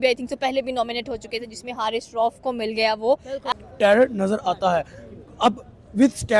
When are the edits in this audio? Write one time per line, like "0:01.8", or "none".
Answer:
0:03.4